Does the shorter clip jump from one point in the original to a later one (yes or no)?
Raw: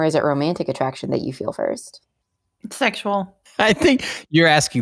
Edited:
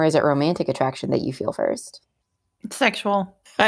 no